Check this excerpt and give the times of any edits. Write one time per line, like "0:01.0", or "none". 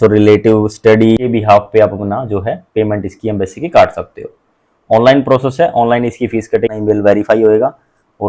0:01.2
0:06.7